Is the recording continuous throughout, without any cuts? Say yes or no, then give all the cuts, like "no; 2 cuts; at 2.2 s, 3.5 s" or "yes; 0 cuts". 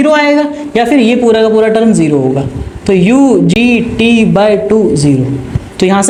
yes; 0 cuts